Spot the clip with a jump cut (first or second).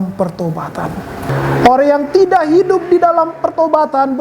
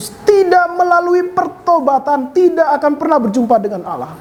first